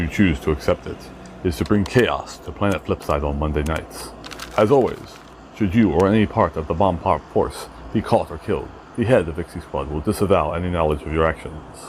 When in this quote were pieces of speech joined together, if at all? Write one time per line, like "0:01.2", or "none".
none